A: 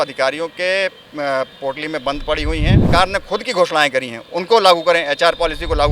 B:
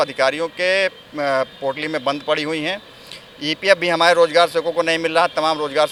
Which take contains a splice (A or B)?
A